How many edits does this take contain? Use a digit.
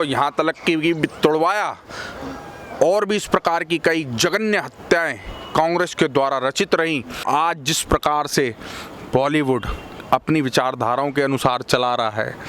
1